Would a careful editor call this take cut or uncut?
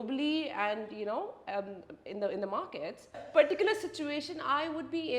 cut